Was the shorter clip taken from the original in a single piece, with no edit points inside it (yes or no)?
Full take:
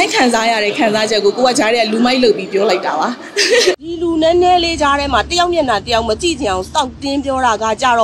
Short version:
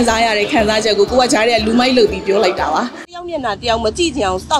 no